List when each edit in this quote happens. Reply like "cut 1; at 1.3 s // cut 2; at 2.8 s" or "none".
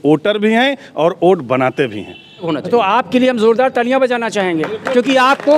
cut 1; at 2.5 s